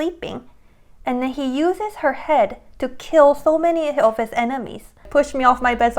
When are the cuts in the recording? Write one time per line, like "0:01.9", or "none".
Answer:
0:05.1